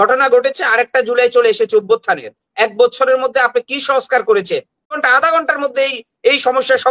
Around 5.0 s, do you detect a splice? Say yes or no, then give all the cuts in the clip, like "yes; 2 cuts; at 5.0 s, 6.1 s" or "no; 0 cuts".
yes; 1 cut; at 5.0 s